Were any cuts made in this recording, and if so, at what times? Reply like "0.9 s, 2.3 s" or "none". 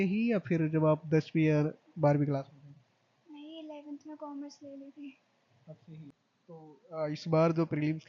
6.2 s

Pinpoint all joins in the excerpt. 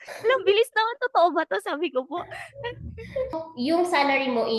3.5 s

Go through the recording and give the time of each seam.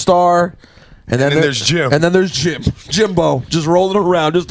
1.6 s

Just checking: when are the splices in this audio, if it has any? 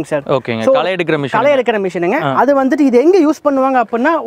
none

